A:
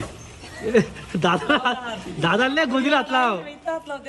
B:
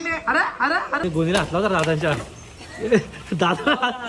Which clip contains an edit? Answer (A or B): B